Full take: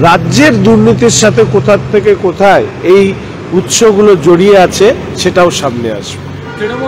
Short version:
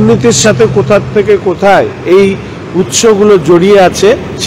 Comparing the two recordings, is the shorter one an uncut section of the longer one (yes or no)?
yes